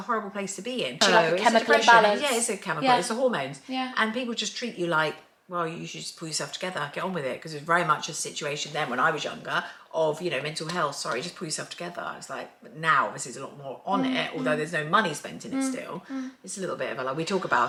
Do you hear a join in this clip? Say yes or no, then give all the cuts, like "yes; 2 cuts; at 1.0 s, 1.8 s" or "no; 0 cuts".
no; 0 cuts